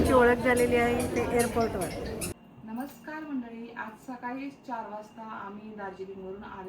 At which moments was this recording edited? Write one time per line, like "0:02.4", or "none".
0:02.3